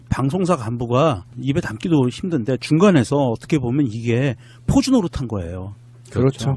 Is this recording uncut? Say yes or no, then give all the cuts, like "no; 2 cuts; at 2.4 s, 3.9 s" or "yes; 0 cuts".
no; 1 cut; at 2.4 s